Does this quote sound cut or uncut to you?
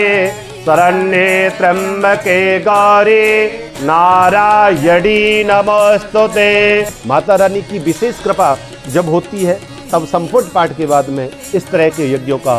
cut